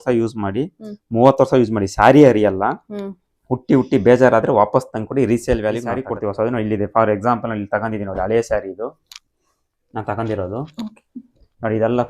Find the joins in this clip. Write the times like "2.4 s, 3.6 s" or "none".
6.1 s